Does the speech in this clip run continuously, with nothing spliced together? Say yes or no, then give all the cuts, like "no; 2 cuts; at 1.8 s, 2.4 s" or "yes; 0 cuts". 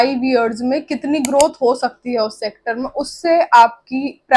yes; 0 cuts